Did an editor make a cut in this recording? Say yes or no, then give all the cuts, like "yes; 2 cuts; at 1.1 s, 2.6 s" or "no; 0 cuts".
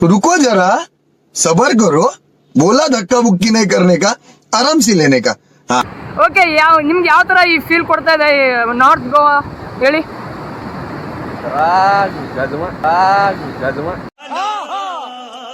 no; 0 cuts